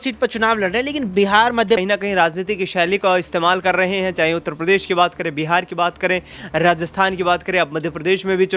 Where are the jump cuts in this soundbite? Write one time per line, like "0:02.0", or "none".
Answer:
0:01.8